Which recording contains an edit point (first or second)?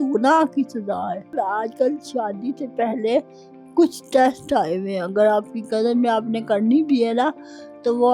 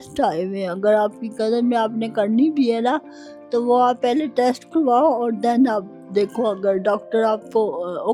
first